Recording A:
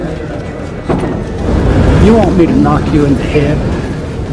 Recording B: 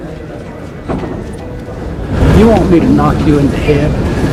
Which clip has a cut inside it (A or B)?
A